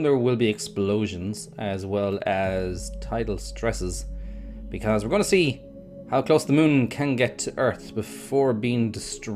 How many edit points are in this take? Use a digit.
1